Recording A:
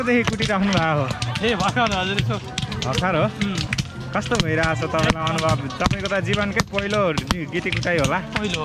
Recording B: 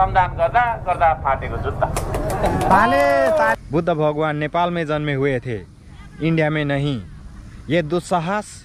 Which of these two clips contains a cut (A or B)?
B